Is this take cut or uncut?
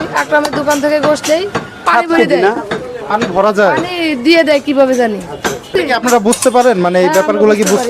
cut